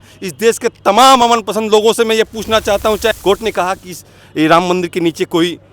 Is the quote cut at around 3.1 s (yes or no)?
yes